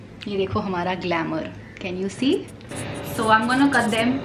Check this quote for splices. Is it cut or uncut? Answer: cut